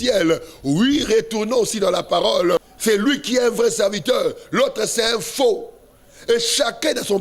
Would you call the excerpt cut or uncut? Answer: cut